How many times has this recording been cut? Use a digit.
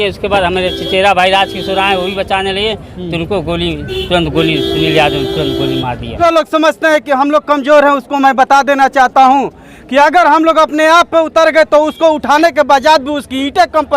1